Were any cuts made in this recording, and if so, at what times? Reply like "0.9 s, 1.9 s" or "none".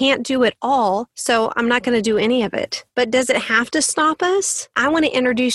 1.1 s, 2.8 s, 4.8 s